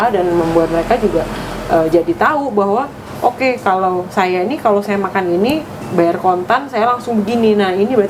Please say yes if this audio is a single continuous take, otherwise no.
yes